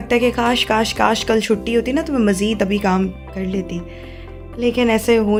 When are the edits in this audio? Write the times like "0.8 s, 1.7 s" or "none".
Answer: none